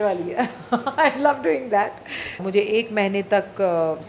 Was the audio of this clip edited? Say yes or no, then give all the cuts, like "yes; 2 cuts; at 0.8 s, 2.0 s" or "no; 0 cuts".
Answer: yes; 1 cut; at 2.4 s